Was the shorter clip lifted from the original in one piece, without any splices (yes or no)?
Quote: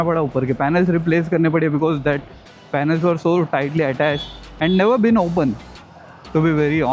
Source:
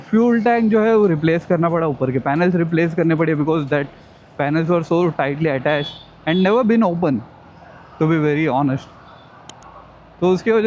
yes